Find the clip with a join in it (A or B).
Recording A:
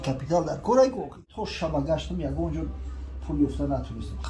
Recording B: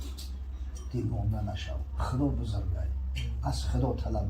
A